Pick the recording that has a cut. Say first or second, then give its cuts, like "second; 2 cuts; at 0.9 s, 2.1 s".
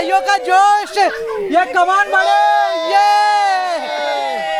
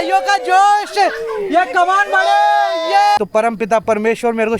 second; 1 cut; at 3.2 s